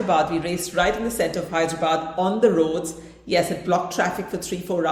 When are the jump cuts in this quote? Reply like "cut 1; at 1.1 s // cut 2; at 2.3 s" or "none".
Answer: none